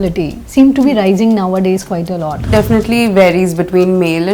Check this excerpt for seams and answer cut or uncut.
cut